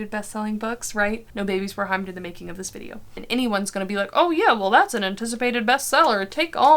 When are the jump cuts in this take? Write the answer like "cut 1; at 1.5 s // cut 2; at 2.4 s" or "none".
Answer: cut 1; at 1.3 s // cut 2; at 3.2 s